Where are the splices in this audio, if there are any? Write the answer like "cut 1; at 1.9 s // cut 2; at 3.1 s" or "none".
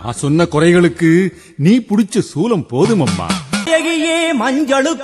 cut 1; at 3.7 s